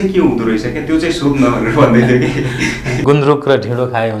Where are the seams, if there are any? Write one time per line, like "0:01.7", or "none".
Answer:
0:03.0